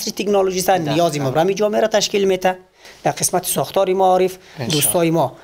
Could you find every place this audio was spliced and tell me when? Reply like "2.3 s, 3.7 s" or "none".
2.9 s